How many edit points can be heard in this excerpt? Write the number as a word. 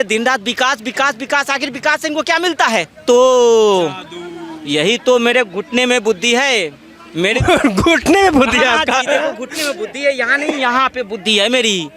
one